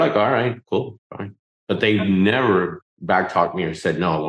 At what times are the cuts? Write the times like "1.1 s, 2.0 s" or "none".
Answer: 2.9 s